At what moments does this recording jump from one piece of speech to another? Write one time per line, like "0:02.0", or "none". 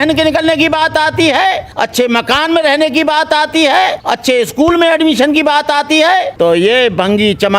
0:01.7
0:04.1
0:06.3